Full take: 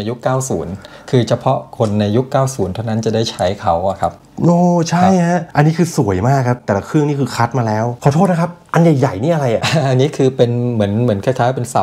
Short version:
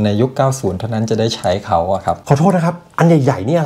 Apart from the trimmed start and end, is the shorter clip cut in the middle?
yes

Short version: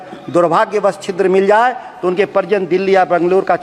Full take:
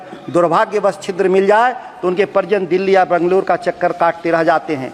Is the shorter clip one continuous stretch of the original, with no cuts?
yes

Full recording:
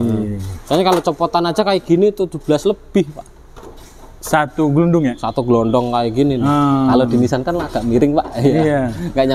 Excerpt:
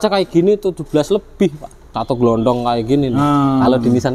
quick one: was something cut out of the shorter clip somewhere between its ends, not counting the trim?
yes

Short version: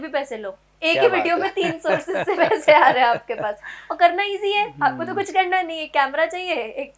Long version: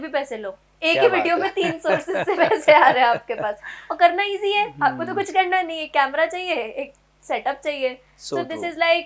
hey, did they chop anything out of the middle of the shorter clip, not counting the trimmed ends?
no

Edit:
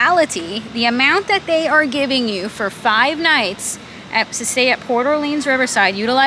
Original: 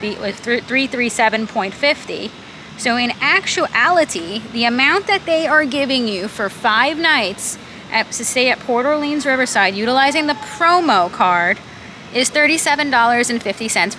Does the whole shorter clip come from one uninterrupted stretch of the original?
yes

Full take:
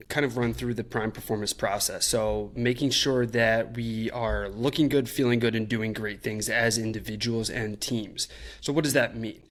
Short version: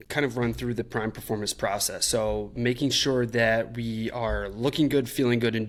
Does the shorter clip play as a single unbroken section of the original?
yes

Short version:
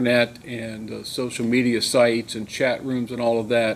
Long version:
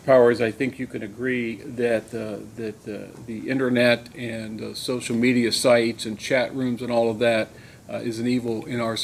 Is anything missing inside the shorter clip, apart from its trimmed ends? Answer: no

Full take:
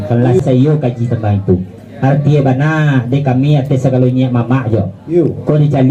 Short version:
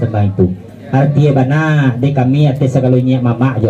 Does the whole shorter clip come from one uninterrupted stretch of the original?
yes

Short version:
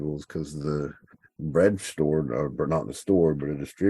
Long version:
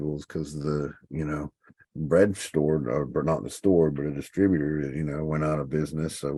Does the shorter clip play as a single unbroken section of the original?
no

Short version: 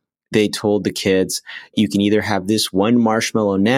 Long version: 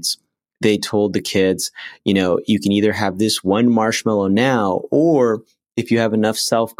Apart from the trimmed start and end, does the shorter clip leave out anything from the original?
yes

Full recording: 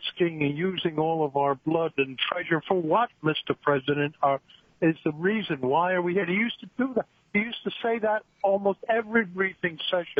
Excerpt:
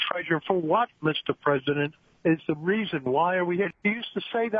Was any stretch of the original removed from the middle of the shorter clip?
yes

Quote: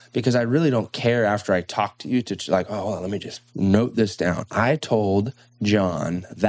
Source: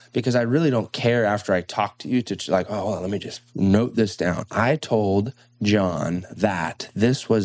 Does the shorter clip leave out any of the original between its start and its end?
no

